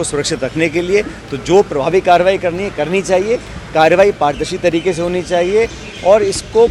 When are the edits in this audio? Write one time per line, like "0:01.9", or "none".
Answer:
none